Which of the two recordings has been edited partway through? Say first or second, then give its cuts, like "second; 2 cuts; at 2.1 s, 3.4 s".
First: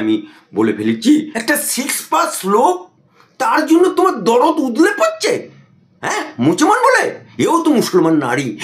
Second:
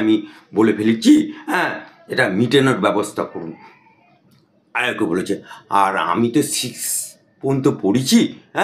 first; 1 cut; at 1.3 s